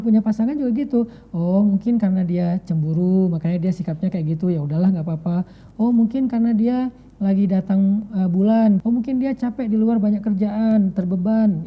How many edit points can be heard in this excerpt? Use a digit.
1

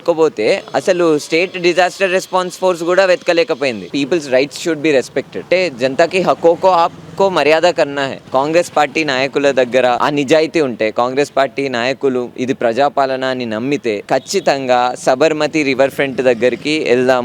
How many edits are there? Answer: 2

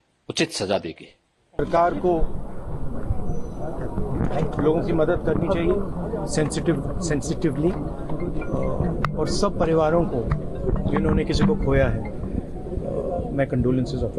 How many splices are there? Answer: 0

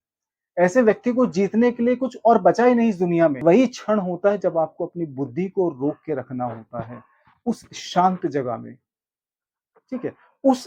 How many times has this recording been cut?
1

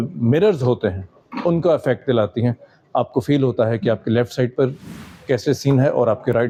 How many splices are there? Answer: 0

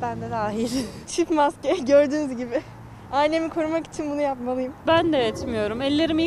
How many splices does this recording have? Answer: 2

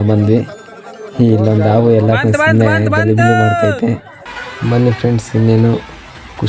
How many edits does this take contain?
1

